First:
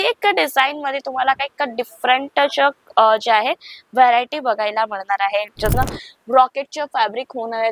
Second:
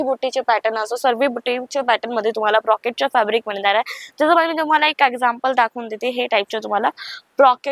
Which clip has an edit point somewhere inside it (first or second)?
first